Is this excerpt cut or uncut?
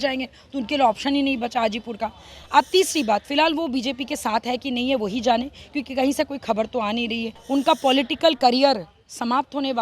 cut